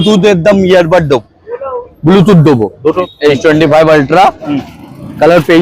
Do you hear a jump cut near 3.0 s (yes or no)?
yes